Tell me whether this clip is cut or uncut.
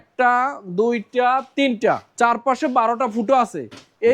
cut